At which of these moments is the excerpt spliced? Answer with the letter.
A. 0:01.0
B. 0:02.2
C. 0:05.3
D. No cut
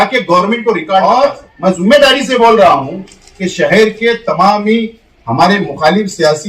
A